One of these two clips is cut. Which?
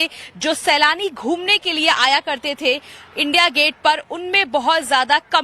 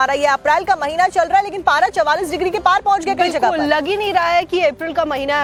first; 1 cut; at 3.4 s

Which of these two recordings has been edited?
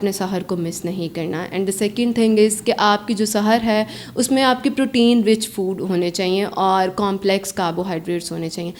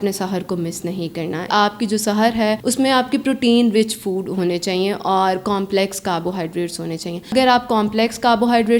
second; 3 cuts; at 1.5 s, 2.6 s, 7.3 s

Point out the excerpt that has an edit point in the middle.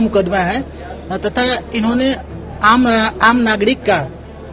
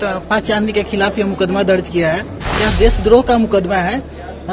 second; 1 cut; at 2.5 s

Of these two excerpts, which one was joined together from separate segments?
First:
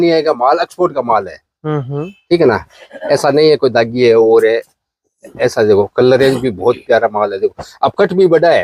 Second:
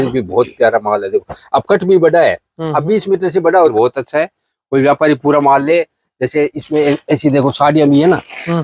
second; 1 cut; at 3.7 s

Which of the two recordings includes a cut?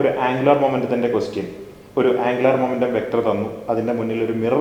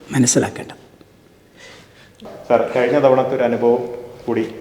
second; 1 cut; at 2.3 s

